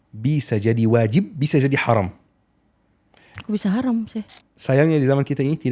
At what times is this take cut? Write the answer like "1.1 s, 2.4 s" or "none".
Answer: 4.3 s